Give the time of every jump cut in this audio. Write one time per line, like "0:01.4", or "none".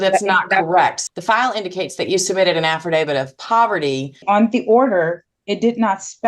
0:01.0
0:04.2